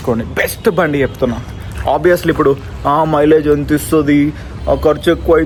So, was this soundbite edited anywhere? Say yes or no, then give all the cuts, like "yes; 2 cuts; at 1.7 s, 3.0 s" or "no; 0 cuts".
no; 0 cuts